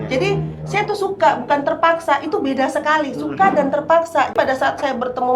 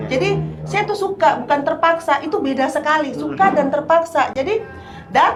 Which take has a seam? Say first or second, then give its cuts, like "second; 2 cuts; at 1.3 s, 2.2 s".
first; 1 cut; at 4.3 s